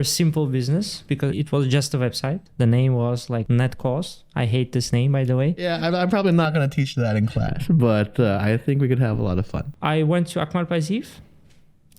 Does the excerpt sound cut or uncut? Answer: cut